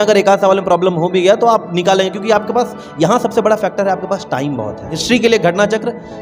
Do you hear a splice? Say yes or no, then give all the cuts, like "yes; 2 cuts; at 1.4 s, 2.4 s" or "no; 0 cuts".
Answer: yes; 1 cut; at 4.9 s